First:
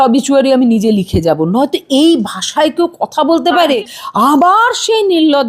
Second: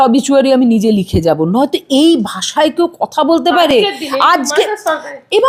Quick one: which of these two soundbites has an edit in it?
first; 1 cut; at 3.7 s

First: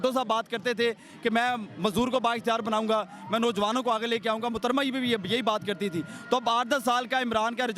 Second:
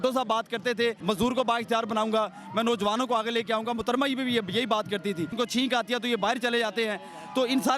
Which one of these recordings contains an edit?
second; 2 cuts; at 1.0 s, 5.3 s

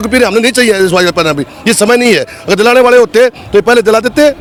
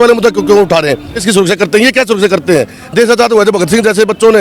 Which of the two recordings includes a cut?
second; 1 cut; at 1.2 s

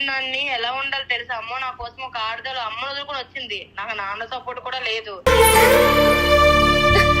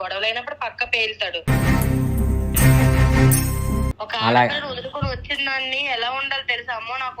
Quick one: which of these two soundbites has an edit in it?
second; 1 cut; at 4.0 s

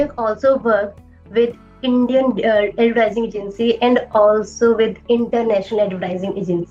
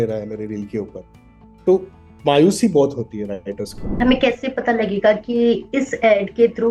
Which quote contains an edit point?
second; 1 cut; at 4.0 s

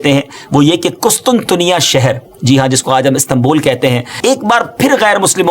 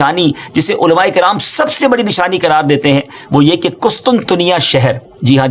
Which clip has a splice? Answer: first; 1 cut; at 4.1 s

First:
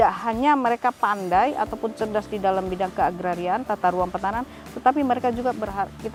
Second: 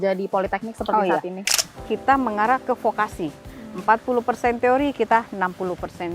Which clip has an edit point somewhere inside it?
second; 1 cut; at 1.5 s

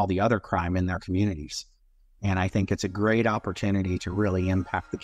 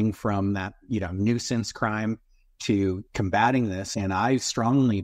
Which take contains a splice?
second; 1 cut; at 3.9 s

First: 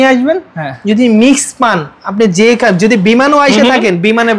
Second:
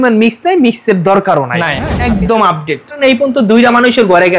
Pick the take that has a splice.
second; 2 cuts; at 1.9 s, 3.0 s

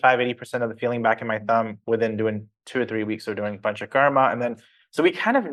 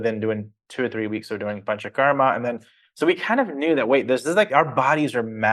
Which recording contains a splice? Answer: second; 1 cut; at 4.5 s

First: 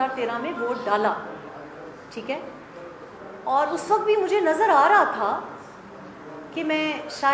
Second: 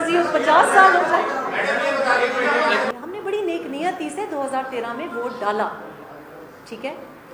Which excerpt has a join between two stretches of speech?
second; 1 cut; at 2.9 s

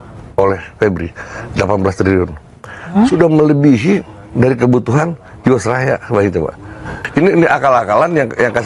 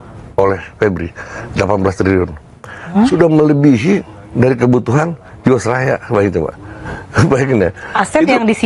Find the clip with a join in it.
first; 1 cut; at 7.0 s

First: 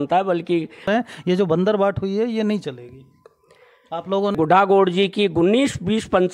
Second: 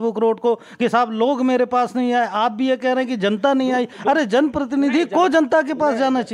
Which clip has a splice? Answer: first; 2 cuts; at 0.9 s, 4.3 s

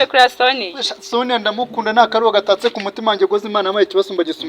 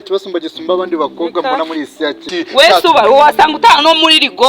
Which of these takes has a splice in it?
second; 1 cut; at 2.2 s

